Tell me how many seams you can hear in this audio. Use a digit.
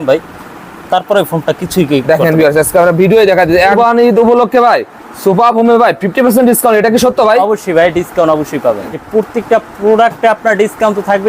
2